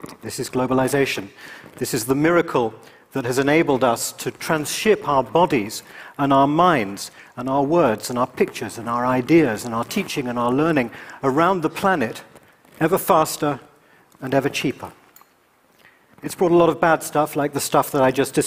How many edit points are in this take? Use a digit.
0